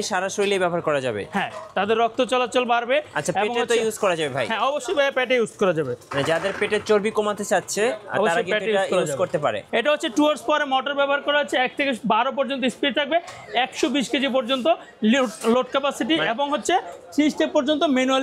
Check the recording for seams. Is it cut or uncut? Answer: cut